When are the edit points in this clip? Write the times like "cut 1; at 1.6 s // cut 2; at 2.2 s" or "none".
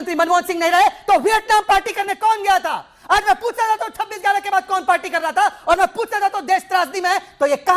none